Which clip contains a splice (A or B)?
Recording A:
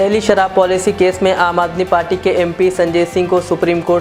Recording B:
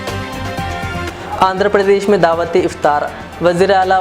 B